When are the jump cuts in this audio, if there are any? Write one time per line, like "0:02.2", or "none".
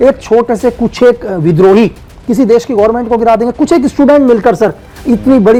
none